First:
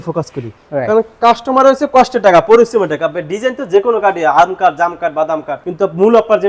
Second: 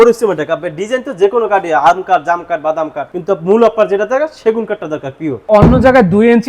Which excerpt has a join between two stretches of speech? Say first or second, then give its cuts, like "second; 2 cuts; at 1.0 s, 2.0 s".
second; 1 cut; at 5.4 s